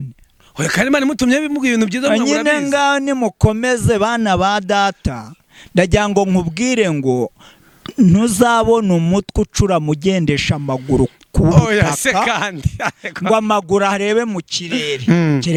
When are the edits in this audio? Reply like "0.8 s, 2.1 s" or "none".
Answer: none